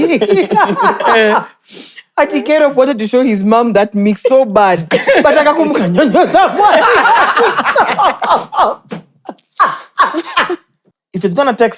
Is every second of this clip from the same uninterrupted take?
no; 1 cut; at 10.8 s

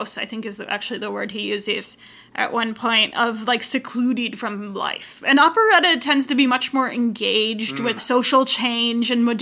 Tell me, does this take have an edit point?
yes; 1 cut; at 8.0 s

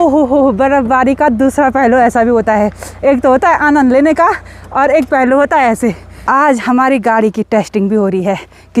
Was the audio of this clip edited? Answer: yes; 1 cut; at 6.2 s

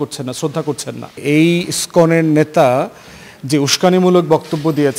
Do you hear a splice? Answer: yes; 1 cut; at 1.2 s

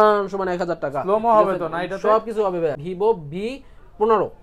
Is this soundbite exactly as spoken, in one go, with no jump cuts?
no; 1 cut; at 2.8 s

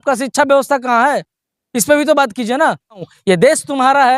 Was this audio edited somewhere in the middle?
yes; 1 cut; at 3.1 s

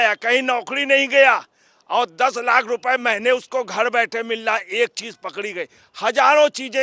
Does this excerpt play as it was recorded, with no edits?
yes; 0 cuts

